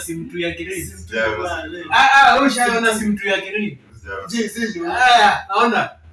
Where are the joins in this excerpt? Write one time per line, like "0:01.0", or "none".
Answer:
none